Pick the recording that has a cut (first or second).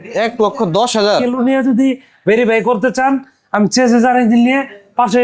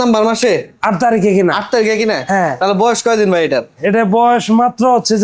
first